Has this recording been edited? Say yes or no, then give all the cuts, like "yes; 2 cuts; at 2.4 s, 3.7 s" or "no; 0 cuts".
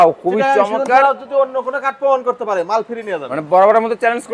no; 0 cuts